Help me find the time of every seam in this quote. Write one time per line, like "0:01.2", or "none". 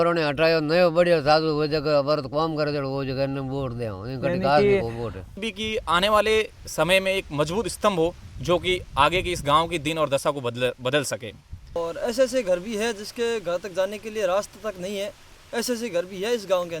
0:05.4
0:11.8